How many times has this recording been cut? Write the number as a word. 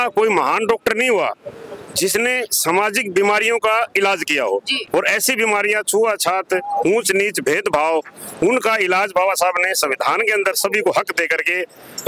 zero